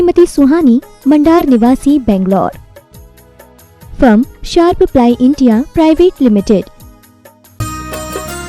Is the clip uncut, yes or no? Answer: no